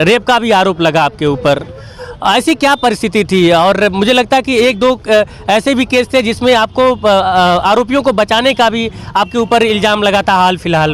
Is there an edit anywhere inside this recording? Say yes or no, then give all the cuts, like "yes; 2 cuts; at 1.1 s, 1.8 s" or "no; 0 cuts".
no; 0 cuts